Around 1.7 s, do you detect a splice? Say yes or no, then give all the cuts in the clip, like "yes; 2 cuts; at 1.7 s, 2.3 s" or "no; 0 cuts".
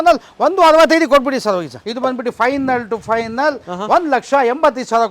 yes; 1 cut; at 1.7 s